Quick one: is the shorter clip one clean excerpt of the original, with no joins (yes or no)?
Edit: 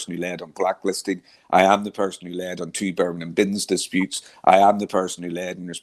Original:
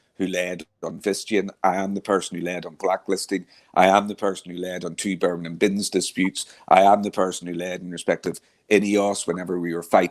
yes